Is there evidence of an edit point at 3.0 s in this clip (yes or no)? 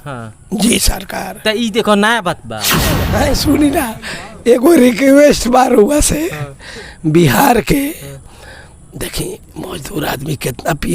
yes